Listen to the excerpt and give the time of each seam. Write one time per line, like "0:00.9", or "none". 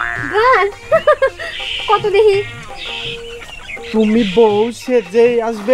none